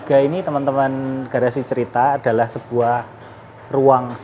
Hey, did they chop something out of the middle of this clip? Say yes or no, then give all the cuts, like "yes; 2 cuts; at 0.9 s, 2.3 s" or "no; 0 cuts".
no; 0 cuts